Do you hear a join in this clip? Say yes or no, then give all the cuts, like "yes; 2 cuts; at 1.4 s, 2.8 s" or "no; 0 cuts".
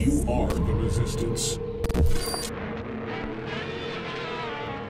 no; 0 cuts